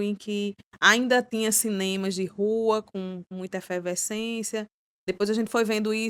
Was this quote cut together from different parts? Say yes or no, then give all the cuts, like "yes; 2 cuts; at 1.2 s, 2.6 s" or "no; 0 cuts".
no; 0 cuts